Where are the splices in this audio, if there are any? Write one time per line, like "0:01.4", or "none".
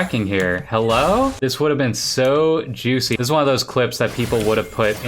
0:01.4
0:03.2